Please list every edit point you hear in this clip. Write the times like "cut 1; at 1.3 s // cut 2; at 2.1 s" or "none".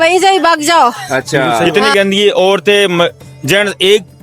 cut 1; at 1.6 s

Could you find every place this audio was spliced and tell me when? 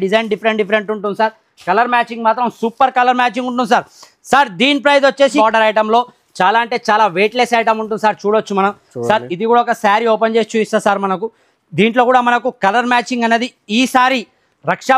cut 1; at 5.3 s

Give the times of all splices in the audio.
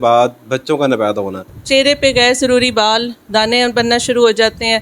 cut 1; at 1.5 s

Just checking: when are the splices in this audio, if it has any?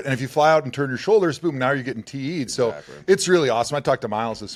none

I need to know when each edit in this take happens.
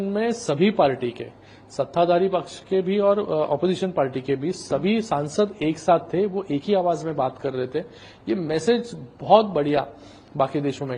none

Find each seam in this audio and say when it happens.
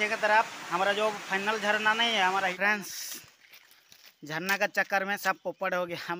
cut 1; at 2.5 s

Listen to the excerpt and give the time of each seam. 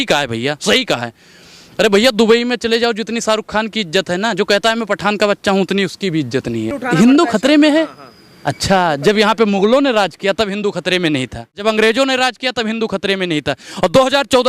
cut 1; at 6.8 s // cut 2; at 11.6 s

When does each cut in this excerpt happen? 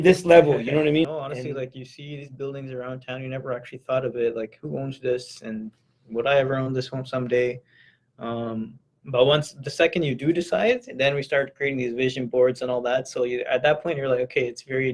cut 1; at 1.1 s

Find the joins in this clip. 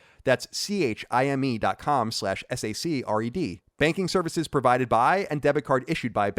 cut 1; at 3.6 s

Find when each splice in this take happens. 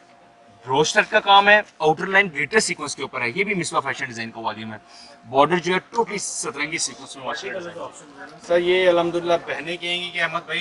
cut 1; at 8.3 s

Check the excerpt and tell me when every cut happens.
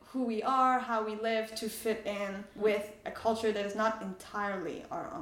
cut 1; at 2.5 s

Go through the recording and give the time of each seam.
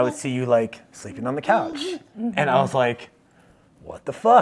none

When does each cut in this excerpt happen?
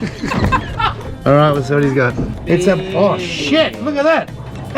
cut 1; at 1.0 s // cut 2; at 2.3 s

